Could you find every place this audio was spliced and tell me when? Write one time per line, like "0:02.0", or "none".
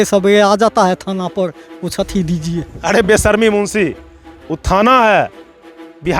0:02.7